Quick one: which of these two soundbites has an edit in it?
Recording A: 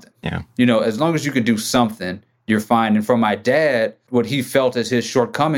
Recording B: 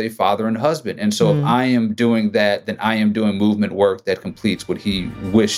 A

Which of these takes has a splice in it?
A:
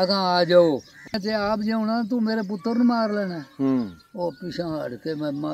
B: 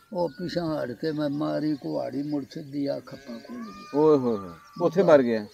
A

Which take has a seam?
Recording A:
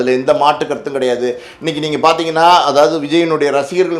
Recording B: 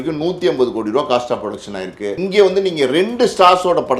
B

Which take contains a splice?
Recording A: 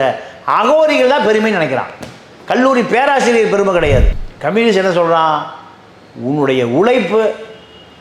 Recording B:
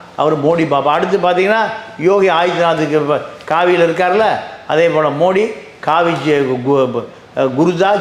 A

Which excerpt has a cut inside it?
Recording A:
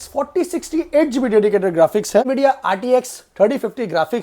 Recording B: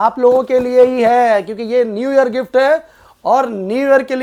A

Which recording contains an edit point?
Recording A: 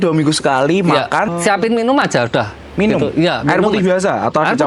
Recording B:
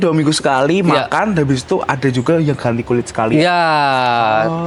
A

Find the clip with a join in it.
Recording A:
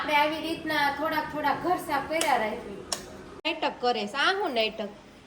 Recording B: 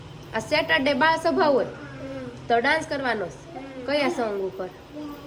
A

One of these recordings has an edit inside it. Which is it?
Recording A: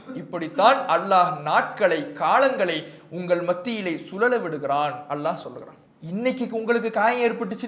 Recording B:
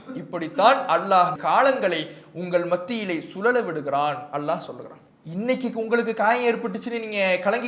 B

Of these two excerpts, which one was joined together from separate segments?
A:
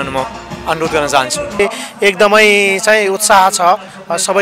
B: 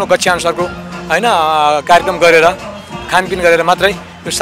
A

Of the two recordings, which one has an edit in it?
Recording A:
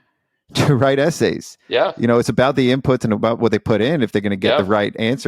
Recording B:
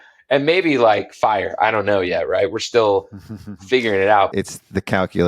B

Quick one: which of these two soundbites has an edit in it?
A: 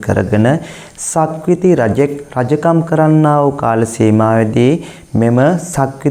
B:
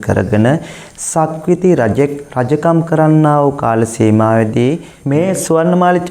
B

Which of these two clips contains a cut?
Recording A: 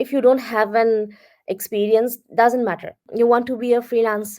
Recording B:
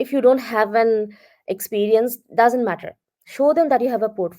A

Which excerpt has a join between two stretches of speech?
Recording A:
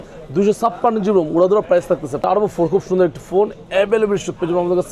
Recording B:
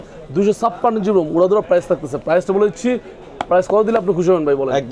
A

